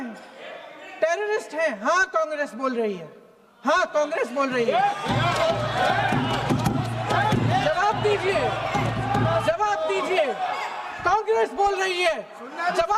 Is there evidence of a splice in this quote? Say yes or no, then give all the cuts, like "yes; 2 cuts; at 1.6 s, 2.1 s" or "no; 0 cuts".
no; 0 cuts